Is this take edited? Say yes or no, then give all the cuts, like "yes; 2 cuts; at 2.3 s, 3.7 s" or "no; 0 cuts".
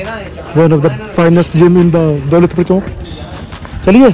no; 0 cuts